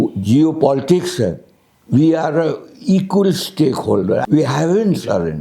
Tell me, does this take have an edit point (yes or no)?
yes